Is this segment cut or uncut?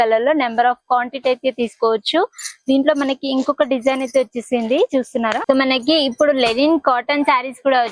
cut